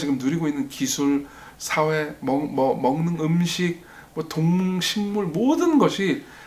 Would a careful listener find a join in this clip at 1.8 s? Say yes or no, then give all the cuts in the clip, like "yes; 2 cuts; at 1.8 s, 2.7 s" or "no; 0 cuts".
no; 0 cuts